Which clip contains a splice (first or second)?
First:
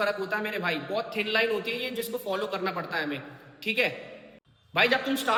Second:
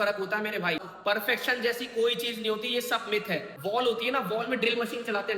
second